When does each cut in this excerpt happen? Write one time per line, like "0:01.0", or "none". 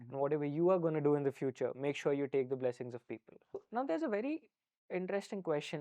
0:03.6

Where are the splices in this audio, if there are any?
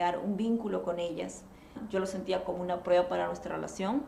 0:01.8

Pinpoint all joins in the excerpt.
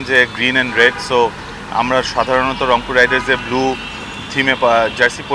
none

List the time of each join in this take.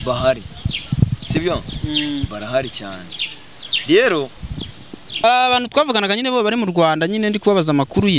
0:05.2

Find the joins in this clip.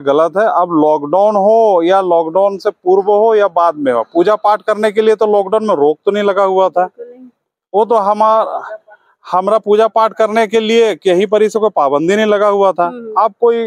none

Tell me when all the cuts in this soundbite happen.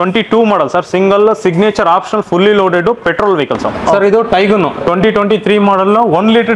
0:03.9

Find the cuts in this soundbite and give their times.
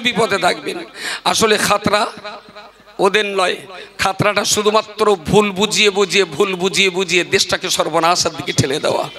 none

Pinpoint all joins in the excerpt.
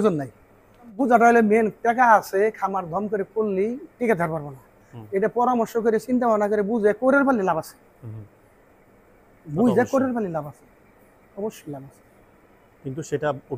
0:01.0

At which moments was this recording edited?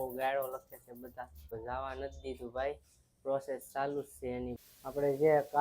0:01.4
0:04.6

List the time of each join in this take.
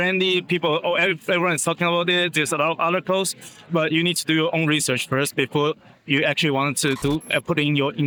none

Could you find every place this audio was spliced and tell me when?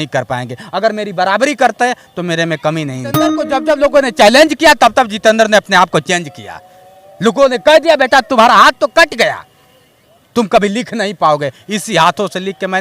0:03.4

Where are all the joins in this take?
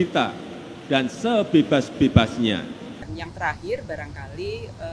0:03.0

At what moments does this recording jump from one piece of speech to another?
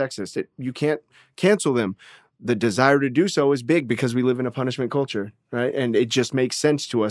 none

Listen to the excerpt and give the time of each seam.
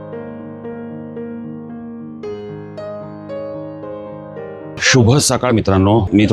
0:04.8

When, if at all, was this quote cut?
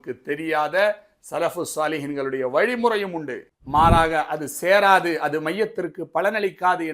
0:03.5

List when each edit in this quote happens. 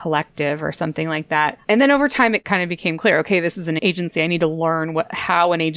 0:01.6
0:02.4
0:03.8

